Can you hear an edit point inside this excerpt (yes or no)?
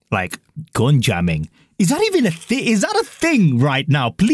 no